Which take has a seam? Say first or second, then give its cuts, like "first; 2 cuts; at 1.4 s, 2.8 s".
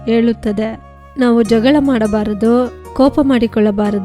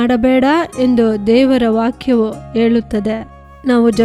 first; 1 cut; at 2.8 s